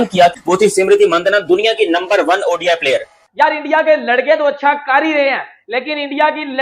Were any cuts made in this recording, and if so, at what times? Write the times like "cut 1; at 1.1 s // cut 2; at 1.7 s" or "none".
cut 1; at 3.2 s